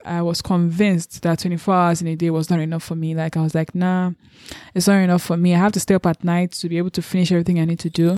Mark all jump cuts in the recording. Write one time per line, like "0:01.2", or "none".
none